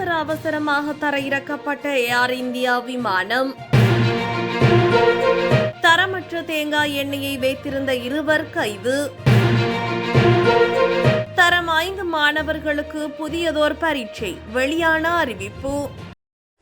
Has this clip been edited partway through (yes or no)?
no